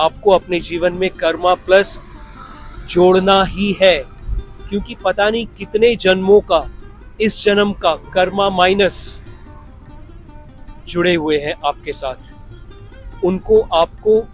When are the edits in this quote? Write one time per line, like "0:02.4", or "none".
none